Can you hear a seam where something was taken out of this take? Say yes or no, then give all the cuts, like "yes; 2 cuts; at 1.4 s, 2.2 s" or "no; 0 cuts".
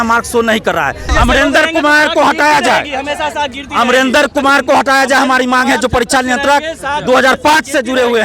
yes; 1 cut; at 1.1 s